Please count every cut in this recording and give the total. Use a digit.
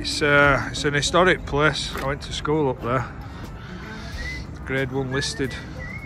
0